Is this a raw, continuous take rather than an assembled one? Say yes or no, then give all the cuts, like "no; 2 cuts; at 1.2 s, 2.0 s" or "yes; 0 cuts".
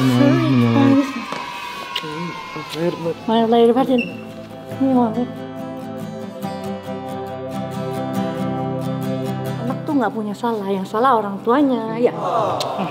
yes; 0 cuts